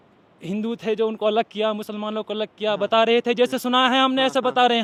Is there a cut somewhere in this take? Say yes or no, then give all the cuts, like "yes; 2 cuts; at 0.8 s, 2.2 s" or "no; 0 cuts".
no; 0 cuts